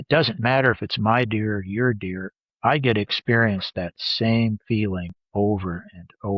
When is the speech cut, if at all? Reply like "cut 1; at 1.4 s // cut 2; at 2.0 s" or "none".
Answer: cut 1; at 5.2 s